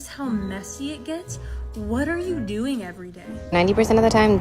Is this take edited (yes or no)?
yes